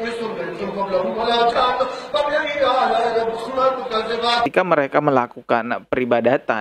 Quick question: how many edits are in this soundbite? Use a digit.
1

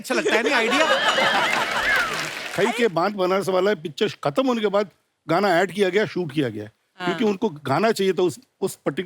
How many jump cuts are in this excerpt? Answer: 1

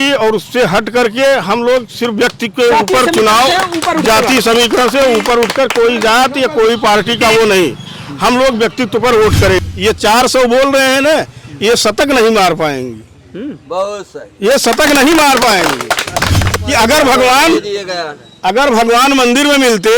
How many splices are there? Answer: 2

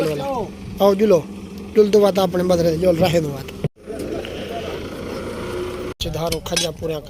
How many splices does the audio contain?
1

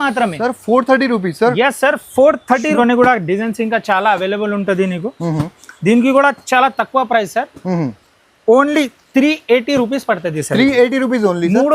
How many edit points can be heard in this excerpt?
1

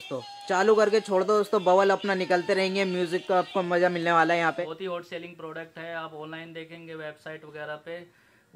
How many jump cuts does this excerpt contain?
1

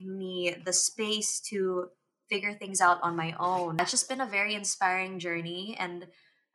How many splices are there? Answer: 1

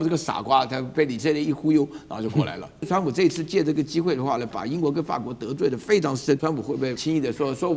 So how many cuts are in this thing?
2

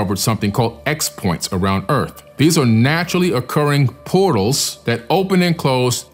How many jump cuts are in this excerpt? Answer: 2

